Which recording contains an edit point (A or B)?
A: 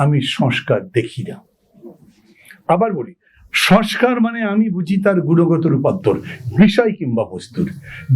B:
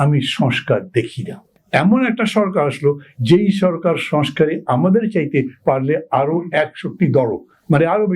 B